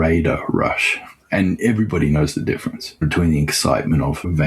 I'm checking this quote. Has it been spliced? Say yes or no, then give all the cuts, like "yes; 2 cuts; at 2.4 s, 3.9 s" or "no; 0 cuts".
yes; 1 cut; at 3.0 s